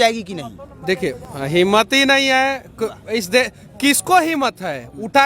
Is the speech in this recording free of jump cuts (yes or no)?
no